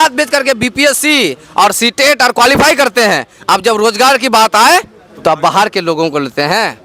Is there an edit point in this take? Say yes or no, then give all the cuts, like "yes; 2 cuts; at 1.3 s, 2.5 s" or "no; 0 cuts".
no; 0 cuts